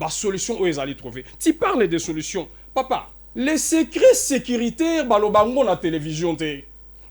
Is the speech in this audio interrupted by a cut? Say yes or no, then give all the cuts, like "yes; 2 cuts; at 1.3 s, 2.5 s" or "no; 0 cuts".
yes; 1 cut; at 3.2 s